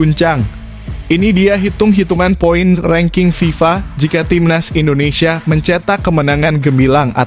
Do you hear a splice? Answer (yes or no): no